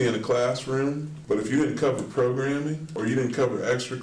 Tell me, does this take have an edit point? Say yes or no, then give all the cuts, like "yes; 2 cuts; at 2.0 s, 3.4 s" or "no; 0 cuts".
yes; 2 cuts; at 1.1 s, 2.9 s